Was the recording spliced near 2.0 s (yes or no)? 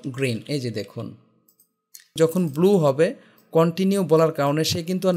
yes